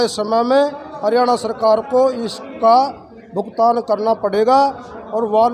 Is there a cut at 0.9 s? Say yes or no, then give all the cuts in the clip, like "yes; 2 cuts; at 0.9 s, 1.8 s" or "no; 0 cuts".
no; 0 cuts